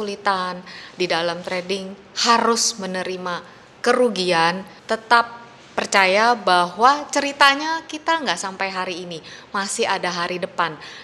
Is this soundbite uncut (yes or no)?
no